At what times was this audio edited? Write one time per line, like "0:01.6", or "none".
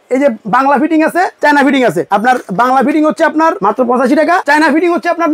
0:01.3
0:02.0
0:03.6
0:04.4

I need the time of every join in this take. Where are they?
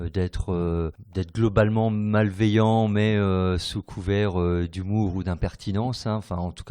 0:01.0

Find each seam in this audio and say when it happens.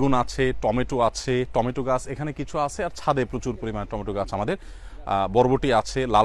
none

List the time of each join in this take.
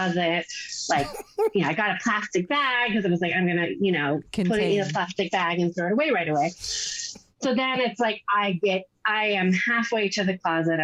none

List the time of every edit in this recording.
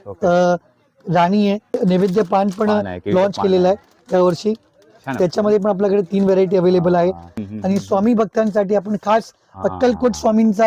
0:01.8
0:07.4

